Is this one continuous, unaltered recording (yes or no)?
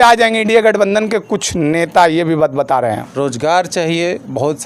no